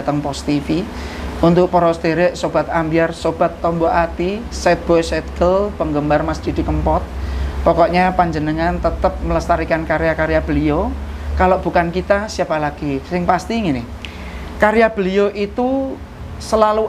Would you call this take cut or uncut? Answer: uncut